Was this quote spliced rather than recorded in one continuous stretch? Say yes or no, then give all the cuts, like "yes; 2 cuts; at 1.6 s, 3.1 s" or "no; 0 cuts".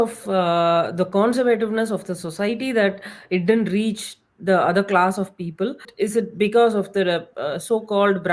yes; 1 cut; at 5.9 s